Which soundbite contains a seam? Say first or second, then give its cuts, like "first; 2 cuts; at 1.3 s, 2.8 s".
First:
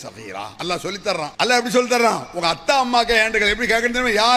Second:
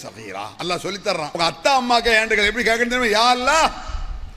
second; 1 cut; at 1.3 s